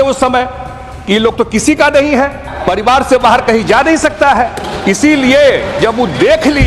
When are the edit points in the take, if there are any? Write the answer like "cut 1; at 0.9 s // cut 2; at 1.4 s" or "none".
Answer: cut 1; at 2.5 s